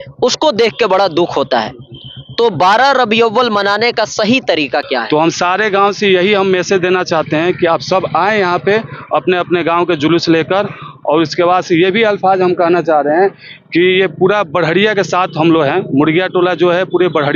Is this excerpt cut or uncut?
cut